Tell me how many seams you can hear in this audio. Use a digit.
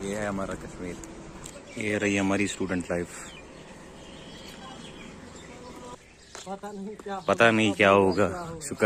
2